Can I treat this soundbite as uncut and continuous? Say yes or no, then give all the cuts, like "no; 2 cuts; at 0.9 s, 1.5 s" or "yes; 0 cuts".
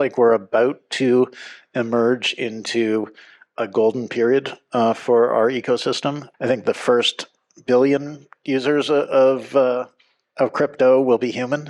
no; 1 cut; at 6.3 s